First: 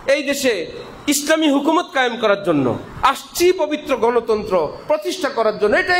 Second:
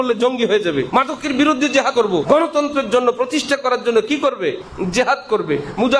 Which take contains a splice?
second; 3 cuts; at 0.9 s, 2.0 s, 4.7 s

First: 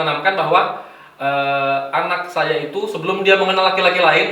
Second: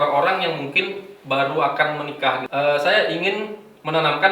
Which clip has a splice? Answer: second; 1 cut; at 2.4 s

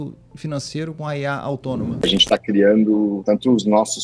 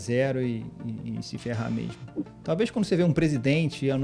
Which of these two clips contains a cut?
first; 3 cuts; at 1.0 s, 2.0 s, 3.2 s

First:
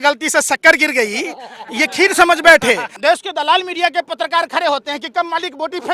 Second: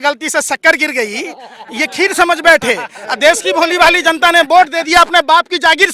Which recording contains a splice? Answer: first; 1 cut; at 2.9 s

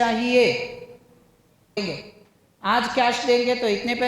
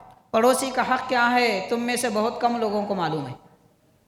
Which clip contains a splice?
first; 1 cut; at 1.8 s

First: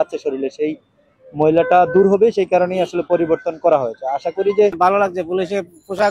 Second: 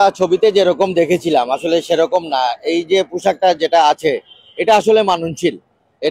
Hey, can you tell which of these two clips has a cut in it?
first; 1 cut; at 4.7 s

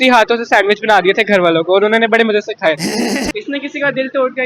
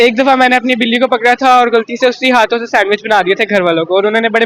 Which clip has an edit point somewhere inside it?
first; 1 cut; at 3.2 s

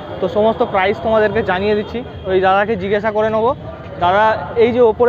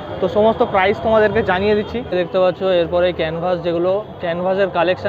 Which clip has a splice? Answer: second; 1 cut; at 2.0 s

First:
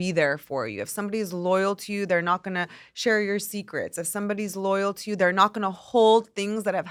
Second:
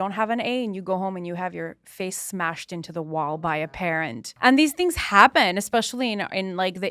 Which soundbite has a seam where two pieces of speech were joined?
second; 1 cut; at 4.2 s

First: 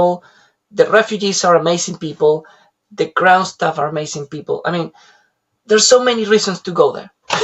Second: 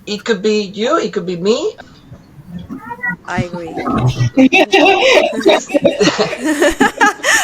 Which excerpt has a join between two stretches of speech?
second; 1 cut; at 1.8 s

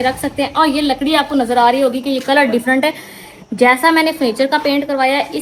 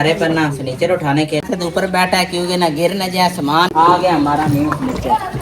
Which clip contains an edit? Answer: second; 2 cuts; at 1.4 s, 3.7 s

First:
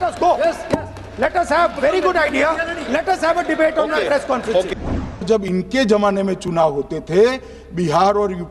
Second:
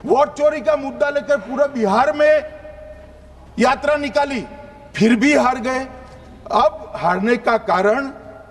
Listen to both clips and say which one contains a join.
first; 1 cut; at 5.2 s

